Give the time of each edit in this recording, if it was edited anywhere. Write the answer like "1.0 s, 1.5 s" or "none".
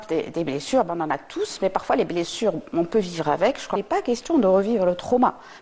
3.8 s